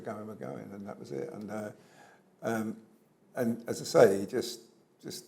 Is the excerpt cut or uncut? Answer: uncut